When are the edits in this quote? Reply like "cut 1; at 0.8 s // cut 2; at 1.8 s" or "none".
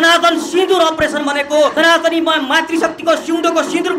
cut 1; at 1.7 s

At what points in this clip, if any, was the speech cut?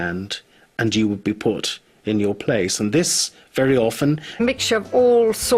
none

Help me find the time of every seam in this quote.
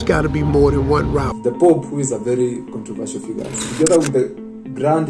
cut 1; at 1.3 s

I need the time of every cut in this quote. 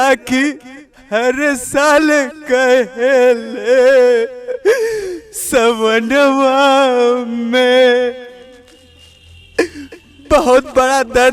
none

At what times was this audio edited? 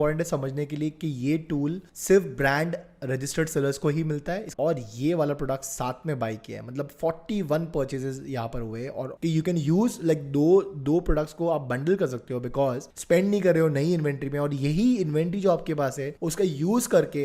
cut 1; at 4.5 s // cut 2; at 9.1 s // cut 3; at 12.9 s

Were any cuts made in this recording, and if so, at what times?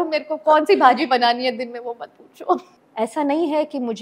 cut 1; at 2.8 s

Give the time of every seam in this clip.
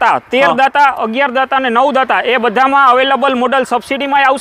none

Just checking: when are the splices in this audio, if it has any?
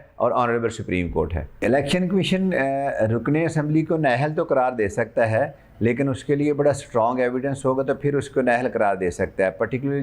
none

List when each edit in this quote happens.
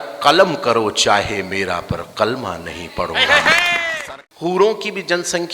cut 1; at 3.9 s

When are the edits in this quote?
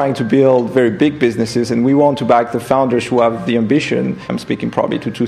cut 1; at 4.3 s

